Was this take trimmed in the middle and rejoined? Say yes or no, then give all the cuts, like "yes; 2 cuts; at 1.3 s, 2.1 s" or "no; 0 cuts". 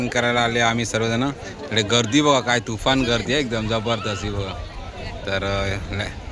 no; 0 cuts